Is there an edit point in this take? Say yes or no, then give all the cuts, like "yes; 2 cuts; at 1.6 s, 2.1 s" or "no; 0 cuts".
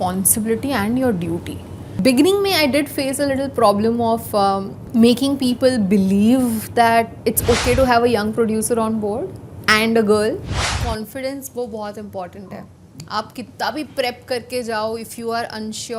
yes; 4 cuts; at 2.0 s, 4.7 s, 7.1 s, 10.8 s